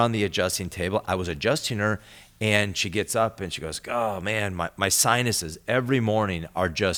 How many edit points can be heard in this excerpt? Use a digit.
0